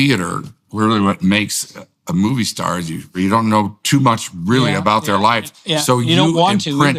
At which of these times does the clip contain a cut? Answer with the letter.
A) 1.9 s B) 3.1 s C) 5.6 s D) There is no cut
B